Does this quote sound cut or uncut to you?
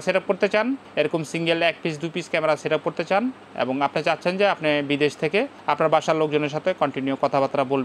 uncut